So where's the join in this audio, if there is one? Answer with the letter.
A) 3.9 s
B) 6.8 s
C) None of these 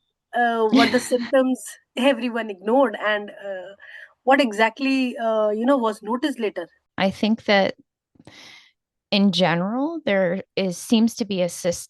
B